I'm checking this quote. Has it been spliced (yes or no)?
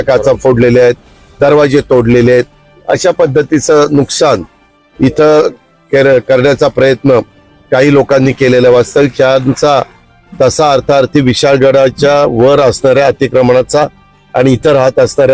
no